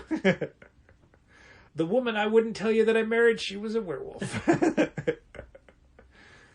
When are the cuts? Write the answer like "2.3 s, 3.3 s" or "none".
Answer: 1.6 s